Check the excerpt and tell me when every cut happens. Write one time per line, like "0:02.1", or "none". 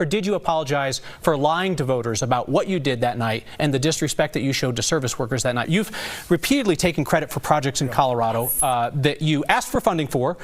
0:05.7